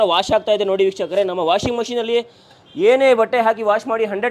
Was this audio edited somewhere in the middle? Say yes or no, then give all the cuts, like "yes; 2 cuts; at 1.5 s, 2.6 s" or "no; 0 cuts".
no; 0 cuts